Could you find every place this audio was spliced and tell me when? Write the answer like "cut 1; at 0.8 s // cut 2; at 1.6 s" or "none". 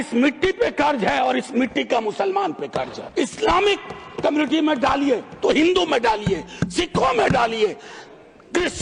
cut 1; at 3.0 s